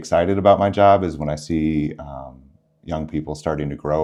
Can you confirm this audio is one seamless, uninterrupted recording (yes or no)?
yes